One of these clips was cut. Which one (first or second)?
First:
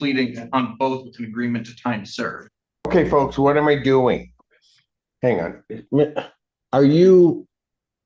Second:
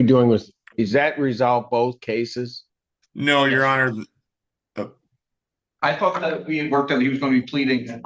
first